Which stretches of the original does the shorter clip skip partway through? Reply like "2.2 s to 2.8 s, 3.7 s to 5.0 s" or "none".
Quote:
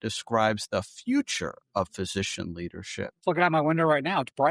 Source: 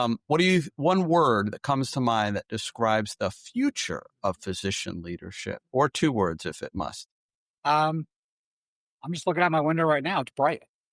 5.7 s to 9.2 s